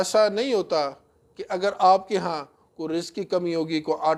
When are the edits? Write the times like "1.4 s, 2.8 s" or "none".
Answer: none